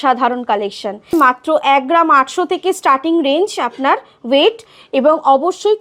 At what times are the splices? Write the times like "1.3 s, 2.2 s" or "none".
1.1 s